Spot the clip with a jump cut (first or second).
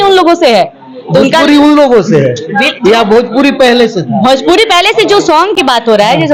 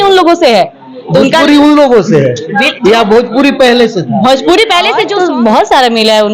second